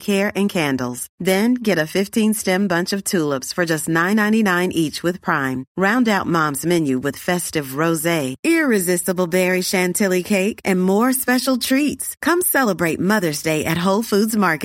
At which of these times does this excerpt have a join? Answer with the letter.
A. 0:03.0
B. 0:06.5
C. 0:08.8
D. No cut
D